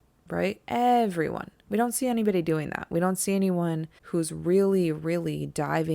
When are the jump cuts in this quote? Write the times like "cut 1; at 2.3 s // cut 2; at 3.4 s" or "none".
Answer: cut 1; at 3.9 s